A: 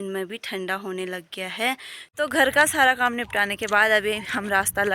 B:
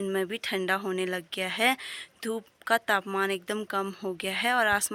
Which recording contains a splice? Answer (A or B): A